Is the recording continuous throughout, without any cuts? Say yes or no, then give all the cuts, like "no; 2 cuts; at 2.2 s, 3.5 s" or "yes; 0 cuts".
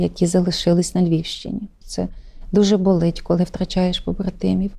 yes; 0 cuts